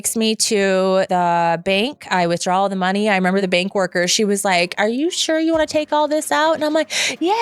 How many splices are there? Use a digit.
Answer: 2